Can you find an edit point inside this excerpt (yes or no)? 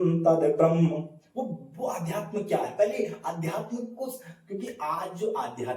no